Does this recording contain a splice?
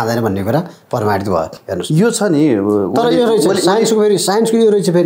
no; 0 cuts

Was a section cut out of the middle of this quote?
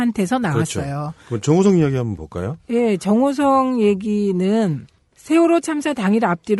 yes; 1 cut; at 1.1 s

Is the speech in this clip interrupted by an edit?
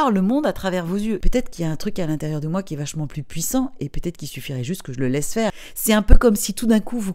yes; 2 cuts; at 1.3 s, 5.6 s

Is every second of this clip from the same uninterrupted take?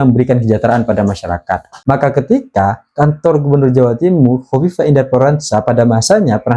no; 1 cut; at 1.7 s

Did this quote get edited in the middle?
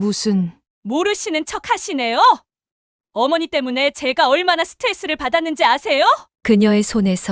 yes; 1 cut; at 6.3 s

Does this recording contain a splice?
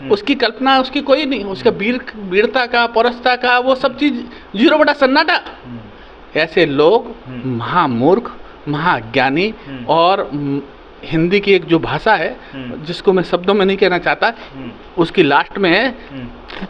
no; 0 cuts

